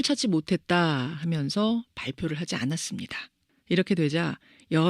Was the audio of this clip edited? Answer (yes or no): yes